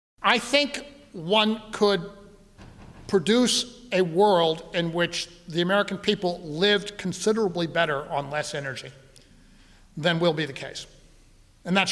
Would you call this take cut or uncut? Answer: uncut